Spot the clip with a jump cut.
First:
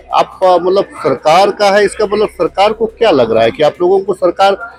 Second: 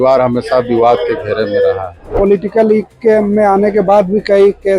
second; 1 cut; at 2.1 s

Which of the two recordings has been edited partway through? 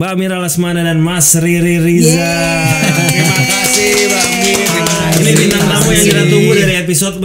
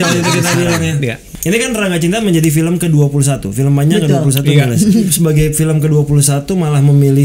second; 2 cuts; at 1.3 s, 5.1 s

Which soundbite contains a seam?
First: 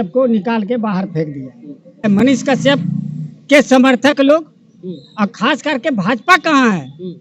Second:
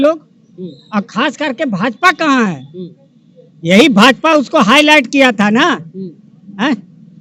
first; 1 cut; at 2.1 s

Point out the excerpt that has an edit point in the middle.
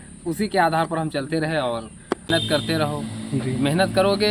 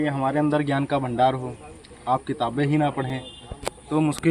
first; 1 cut; at 2.3 s

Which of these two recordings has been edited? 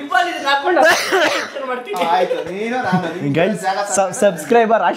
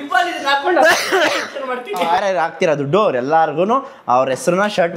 second; 1 cut; at 2.2 s

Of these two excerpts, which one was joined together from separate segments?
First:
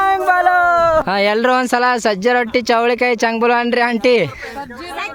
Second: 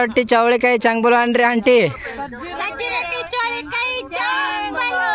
first; 1 cut; at 1.1 s

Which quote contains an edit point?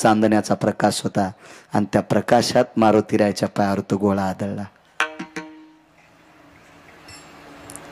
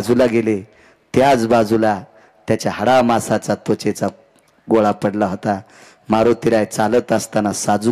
first; 1 cut; at 5.6 s

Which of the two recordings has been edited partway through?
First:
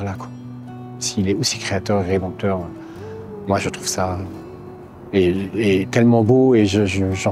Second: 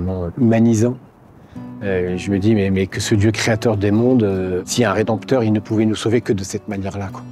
second; 1 cut; at 4.7 s

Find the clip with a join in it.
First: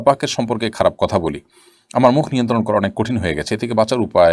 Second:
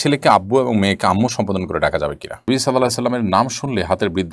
second; 1 cut; at 2.5 s

